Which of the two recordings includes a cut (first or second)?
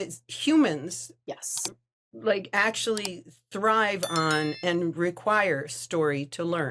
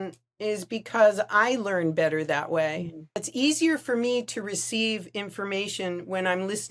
second